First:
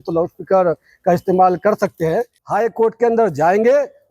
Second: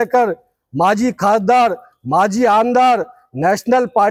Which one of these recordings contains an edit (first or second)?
first